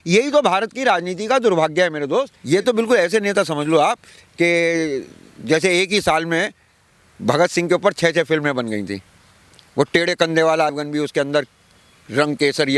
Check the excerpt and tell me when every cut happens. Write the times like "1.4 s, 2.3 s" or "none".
2.4 s, 10.8 s